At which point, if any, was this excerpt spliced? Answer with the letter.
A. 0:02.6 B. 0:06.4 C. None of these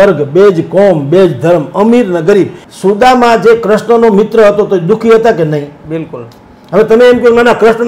A